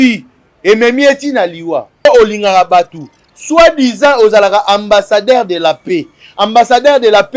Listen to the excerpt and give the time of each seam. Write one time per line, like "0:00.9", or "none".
0:02.0